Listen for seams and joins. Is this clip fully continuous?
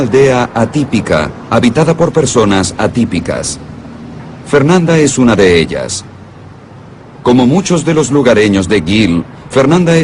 yes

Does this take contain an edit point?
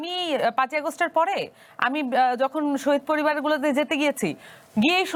no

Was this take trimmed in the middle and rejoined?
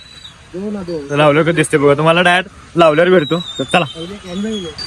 no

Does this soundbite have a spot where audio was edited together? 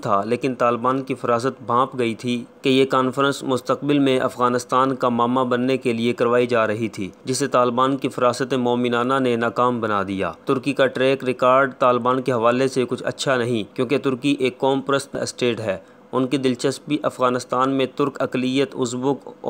no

